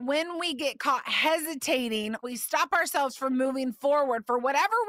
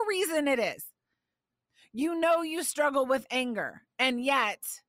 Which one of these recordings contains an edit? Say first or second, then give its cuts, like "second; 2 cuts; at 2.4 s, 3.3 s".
first; 1 cut; at 2.2 s